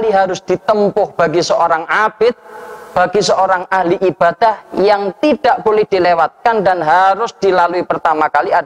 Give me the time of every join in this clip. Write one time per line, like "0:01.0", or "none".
none